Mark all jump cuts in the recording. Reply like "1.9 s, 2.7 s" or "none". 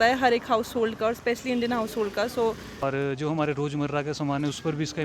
2.8 s